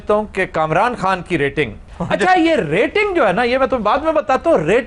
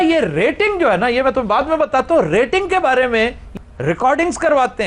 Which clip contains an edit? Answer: second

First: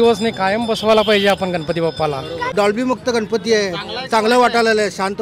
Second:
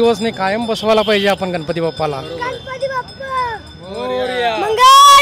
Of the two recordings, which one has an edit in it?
first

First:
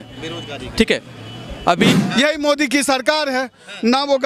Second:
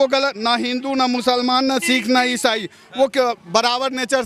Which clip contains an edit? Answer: first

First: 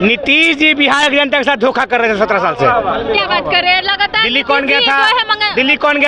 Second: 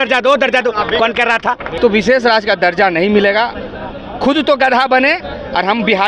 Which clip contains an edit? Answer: second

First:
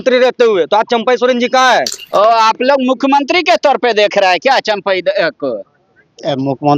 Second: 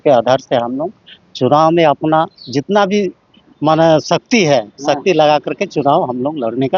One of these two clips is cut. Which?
first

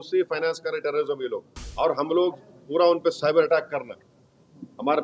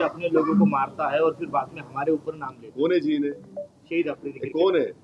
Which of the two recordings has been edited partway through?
first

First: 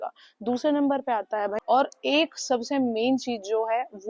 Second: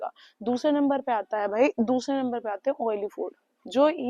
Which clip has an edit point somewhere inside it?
first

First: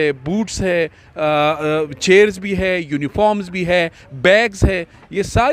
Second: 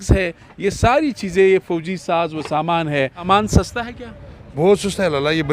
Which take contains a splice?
second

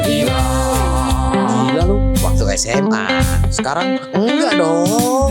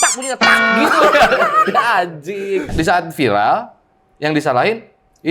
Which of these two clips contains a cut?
second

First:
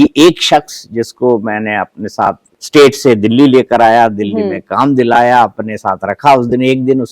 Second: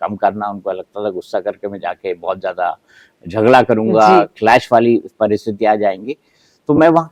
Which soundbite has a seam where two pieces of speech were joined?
first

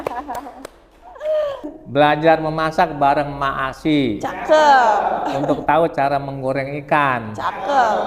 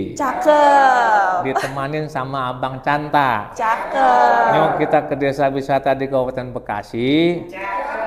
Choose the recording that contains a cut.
first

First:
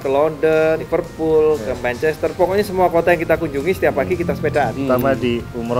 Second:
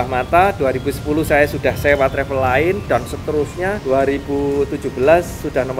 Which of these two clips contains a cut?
first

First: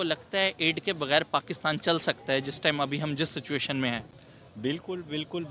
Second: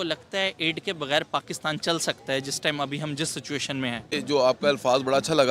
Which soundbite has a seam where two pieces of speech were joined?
second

